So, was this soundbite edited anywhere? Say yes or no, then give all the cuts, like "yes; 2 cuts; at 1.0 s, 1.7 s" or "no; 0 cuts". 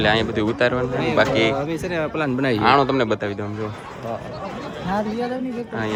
no; 0 cuts